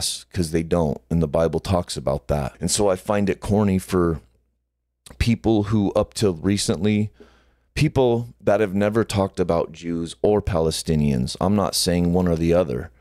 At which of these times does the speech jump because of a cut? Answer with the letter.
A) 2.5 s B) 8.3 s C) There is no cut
A